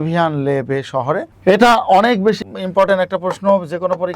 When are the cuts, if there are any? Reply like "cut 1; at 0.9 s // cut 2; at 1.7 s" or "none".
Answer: cut 1; at 1.3 s // cut 2; at 2.4 s